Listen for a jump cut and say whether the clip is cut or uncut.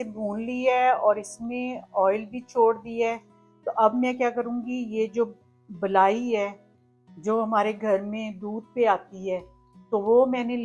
uncut